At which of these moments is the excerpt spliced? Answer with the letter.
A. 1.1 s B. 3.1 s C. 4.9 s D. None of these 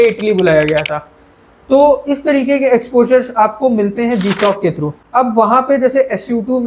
C